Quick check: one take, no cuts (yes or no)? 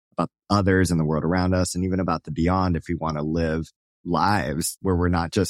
no